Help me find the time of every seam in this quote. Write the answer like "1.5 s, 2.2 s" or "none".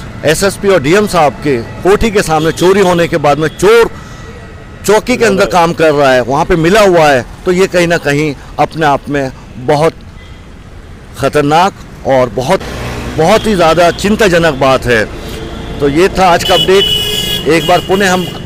none